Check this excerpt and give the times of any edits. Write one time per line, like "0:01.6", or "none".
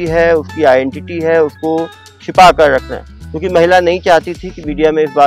none